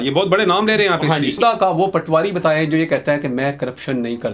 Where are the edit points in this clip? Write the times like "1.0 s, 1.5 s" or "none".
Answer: 1.4 s